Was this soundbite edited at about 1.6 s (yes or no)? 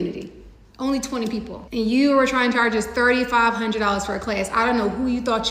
yes